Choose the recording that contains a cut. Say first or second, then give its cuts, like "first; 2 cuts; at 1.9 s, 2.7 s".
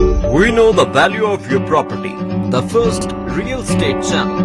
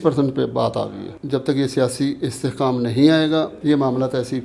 second; 2 cuts; at 1.1 s, 3.6 s